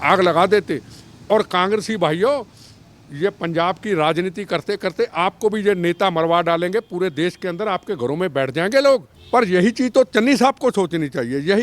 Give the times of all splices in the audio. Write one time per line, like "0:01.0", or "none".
0:09.1